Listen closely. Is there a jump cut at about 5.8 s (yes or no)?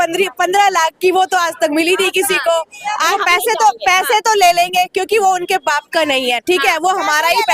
no